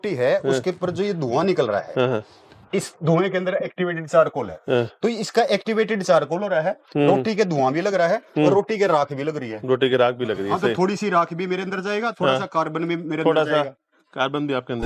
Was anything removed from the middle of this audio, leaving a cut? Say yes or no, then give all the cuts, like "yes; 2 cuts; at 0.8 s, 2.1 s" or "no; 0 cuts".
no; 0 cuts